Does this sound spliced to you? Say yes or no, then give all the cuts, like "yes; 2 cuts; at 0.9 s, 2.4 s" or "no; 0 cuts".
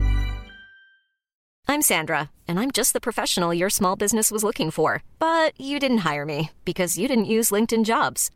no; 0 cuts